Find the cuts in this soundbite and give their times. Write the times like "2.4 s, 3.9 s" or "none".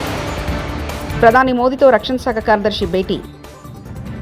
1.1 s